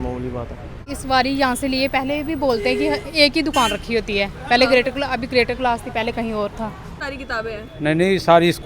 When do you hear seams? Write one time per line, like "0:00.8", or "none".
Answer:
0:00.9
0:06.9